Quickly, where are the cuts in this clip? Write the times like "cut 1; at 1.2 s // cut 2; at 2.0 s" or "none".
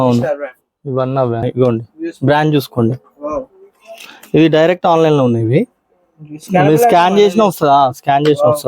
cut 1; at 1.4 s